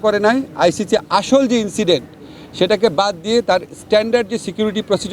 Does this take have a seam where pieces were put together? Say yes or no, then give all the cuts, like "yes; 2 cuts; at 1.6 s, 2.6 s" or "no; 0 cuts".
no; 0 cuts